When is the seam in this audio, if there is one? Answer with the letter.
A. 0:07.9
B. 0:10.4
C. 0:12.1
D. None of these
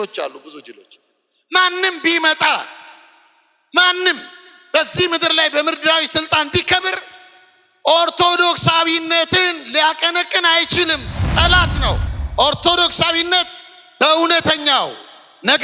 C